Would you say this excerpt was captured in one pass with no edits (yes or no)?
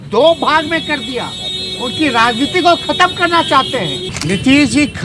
no